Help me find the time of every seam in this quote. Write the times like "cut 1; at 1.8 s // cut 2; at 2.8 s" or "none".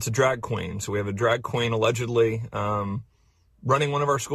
cut 1; at 3.2 s